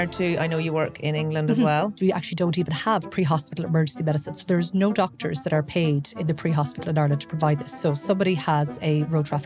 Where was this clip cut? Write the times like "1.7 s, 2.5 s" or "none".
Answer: 2.0 s, 7.8 s